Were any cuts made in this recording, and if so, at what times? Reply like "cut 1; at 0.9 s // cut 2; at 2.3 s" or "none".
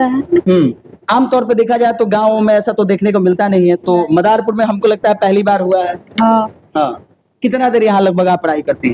none